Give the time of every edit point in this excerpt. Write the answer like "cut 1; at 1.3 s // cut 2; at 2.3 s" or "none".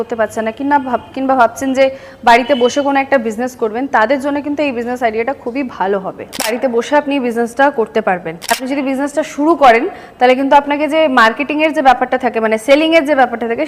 cut 1; at 6.5 s // cut 2; at 8.6 s